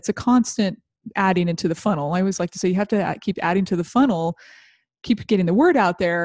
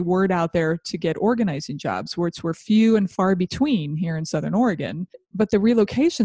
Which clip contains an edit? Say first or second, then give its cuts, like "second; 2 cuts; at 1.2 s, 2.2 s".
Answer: second; 1 cut; at 5.2 s